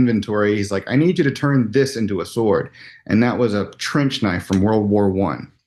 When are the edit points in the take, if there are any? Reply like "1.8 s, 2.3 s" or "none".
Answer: none